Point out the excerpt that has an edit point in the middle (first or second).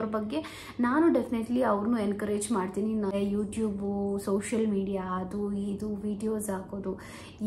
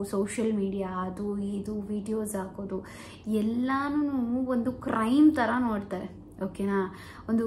first